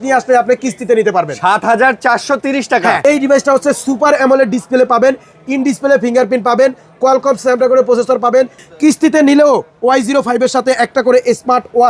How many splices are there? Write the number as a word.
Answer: two